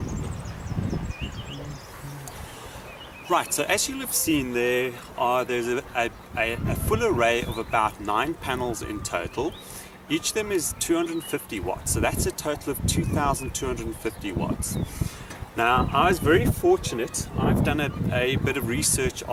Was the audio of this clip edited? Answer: no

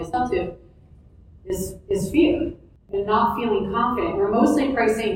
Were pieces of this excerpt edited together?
yes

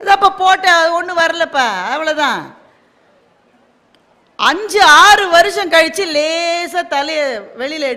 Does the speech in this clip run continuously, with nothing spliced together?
yes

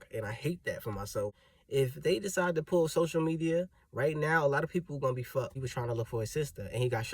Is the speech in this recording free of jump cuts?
no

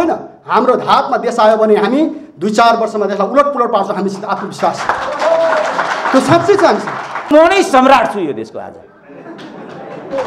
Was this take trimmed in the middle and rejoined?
yes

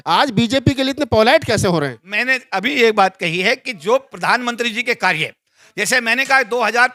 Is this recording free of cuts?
yes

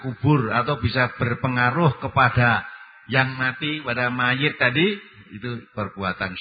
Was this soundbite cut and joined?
no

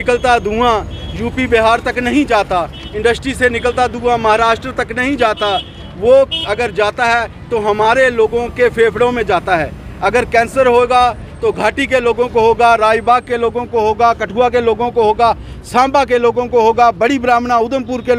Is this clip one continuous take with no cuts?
yes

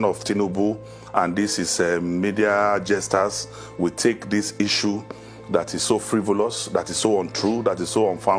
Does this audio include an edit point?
no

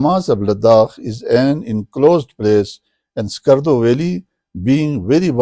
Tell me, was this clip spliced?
no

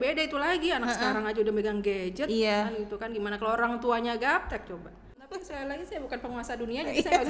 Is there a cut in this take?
yes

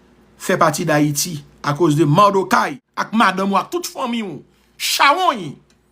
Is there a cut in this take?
yes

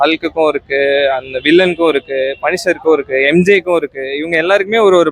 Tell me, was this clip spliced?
no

